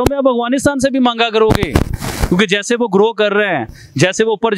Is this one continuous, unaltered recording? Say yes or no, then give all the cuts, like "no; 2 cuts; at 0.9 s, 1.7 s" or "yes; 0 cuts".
yes; 0 cuts